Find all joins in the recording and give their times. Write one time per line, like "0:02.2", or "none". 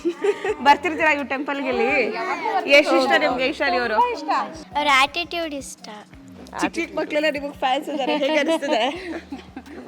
0:04.6

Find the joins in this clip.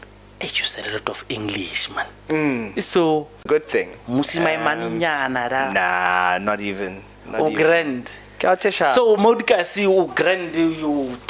0:03.5

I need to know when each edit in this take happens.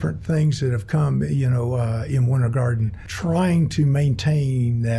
0:03.0

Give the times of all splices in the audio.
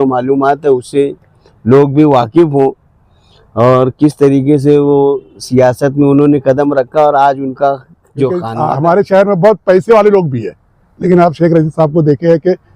0:08.5

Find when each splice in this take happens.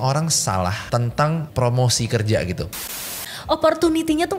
0:01.0
0:03.3

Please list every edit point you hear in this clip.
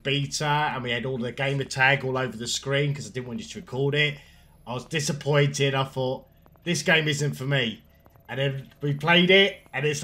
none

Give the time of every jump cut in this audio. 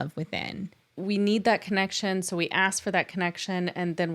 0:01.0

